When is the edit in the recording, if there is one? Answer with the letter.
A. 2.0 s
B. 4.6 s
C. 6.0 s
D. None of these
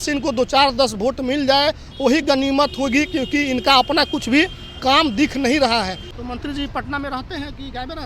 C